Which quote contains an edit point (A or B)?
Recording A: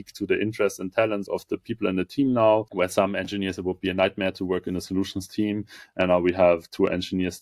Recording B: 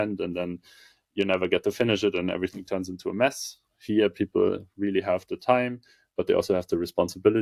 A